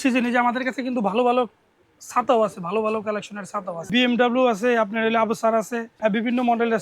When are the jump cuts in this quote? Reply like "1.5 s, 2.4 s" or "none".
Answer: 3.9 s, 5.9 s